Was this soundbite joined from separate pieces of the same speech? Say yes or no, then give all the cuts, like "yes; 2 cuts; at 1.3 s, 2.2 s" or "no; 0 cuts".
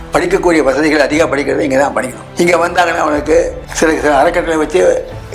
yes; 2 cuts; at 2.2 s, 3.6 s